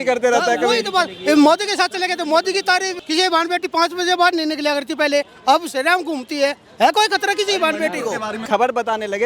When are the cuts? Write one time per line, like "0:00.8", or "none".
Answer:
0:03.0
0:08.4